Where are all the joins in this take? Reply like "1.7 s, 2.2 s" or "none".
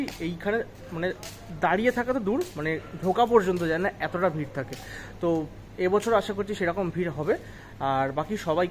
none